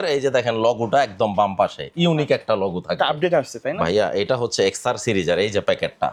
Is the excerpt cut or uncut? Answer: uncut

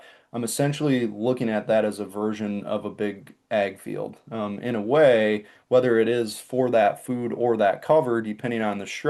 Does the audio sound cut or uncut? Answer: uncut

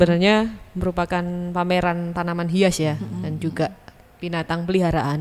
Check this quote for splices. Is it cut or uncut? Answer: uncut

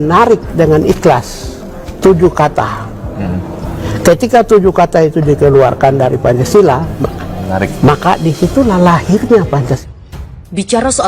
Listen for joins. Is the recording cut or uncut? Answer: cut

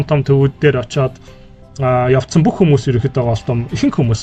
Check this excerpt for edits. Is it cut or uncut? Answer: uncut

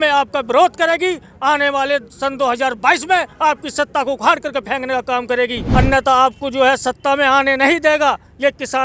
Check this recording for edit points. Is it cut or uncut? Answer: cut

